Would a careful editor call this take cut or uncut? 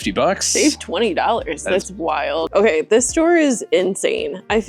cut